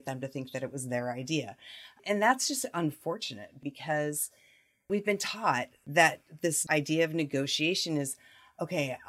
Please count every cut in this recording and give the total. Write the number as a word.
five